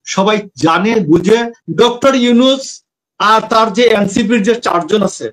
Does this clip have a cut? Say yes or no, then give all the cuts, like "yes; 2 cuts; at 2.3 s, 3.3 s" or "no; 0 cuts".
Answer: yes; 1 cut; at 1.6 s